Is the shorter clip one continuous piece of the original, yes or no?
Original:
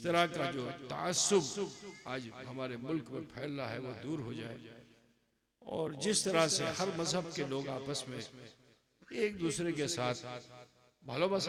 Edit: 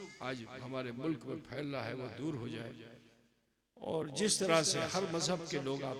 yes